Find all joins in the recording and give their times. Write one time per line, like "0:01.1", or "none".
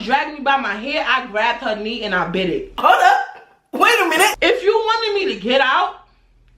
0:04.4